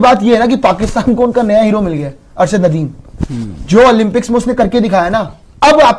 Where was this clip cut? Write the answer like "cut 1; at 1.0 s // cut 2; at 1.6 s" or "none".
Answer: none